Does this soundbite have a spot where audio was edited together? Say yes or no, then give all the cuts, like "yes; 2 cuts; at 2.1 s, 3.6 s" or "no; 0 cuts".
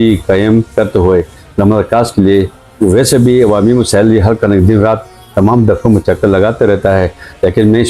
no; 0 cuts